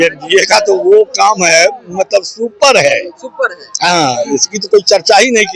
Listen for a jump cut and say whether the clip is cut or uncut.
uncut